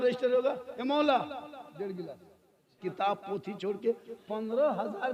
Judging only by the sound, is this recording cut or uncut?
cut